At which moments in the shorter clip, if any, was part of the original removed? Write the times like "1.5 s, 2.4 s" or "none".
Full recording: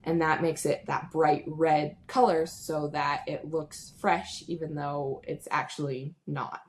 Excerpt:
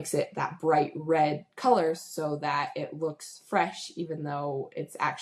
none